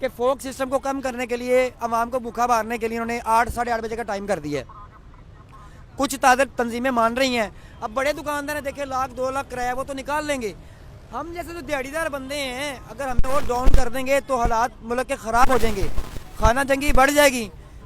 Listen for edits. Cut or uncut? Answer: cut